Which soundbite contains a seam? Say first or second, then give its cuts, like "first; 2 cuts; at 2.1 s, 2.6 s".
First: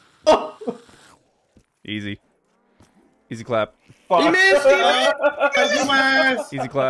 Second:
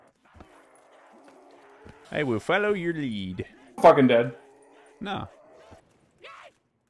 second; 2 cuts; at 2.0 s, 5.8 s